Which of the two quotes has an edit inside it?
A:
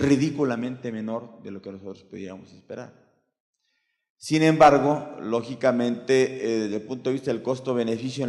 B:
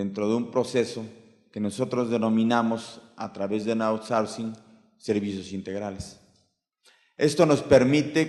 A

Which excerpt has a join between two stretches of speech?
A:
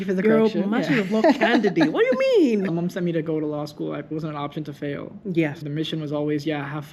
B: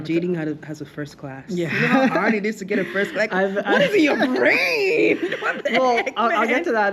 A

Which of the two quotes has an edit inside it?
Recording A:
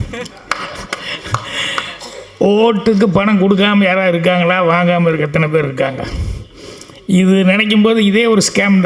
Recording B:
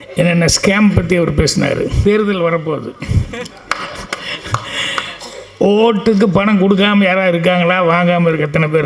B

